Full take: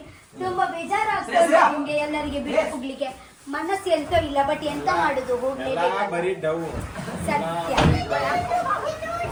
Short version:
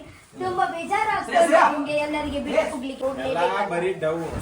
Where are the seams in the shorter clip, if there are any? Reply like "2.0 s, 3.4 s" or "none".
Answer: 3.0 s